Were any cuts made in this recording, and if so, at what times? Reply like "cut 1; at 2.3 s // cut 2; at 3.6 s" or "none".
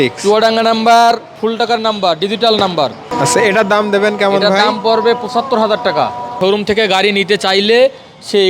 cut 1; at 3.1 s // cut 2; at 6.3 s